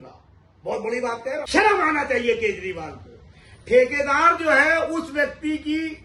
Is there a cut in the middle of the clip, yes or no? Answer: yes